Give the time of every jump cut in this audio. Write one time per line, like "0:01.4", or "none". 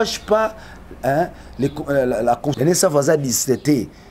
0:02.5